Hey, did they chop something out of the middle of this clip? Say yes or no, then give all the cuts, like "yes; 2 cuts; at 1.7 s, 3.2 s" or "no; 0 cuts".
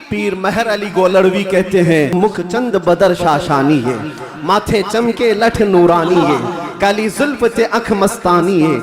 yes; 1 cut; at 2.1 s